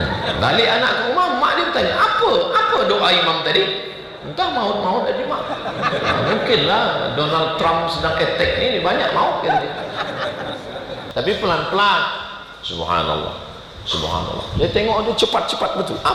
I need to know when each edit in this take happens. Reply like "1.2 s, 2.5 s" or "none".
11.0 s